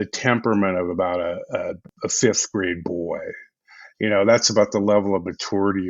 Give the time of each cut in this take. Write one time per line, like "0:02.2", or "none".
0:01.8

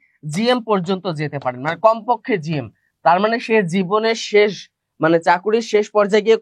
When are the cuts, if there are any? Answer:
none

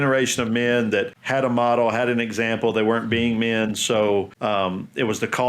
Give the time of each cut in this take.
0:01.2
0:04.3

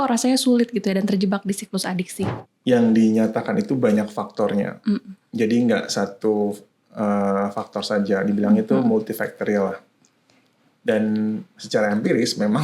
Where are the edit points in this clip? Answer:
0:02.5

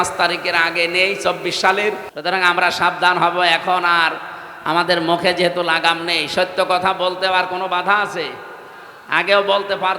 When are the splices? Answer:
0:02.1

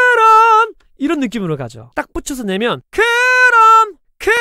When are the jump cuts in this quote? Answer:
0:01.8

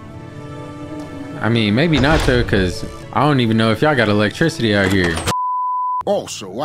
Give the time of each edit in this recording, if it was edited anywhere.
0:05.4

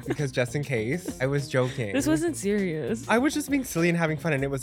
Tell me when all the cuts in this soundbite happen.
0:01.2
0:03.1

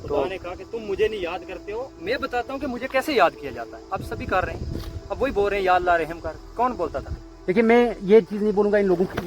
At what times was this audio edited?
0:07.1

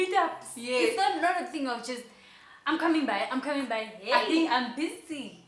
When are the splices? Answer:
none

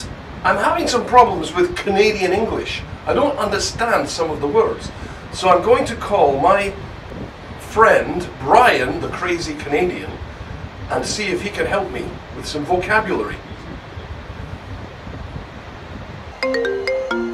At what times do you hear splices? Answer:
0:15.1
0:16.4

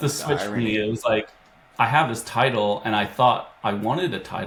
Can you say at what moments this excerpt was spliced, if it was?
none

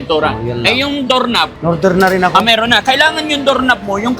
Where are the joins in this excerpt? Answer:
0:01.5

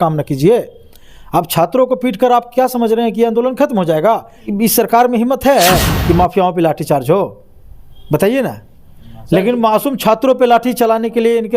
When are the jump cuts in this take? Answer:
0:04.5

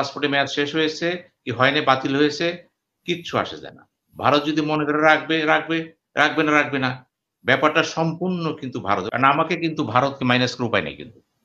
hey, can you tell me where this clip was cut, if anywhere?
0:09.1

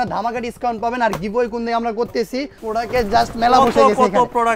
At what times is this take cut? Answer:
0:02.6

